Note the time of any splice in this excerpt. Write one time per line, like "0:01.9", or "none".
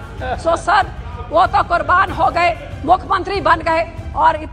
none